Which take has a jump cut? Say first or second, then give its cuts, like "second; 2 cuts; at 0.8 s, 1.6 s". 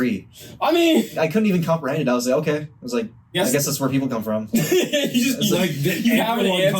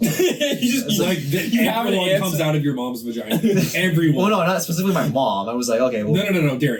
first; 2 cuts; at 1.1 s, 3.3 s